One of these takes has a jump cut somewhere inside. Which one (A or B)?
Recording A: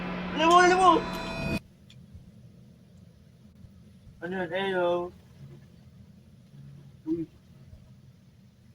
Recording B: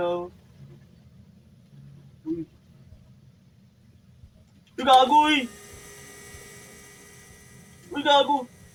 A